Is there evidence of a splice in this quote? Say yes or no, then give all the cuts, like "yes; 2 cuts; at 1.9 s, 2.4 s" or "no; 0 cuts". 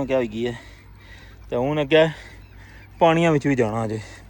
no; 0 cuts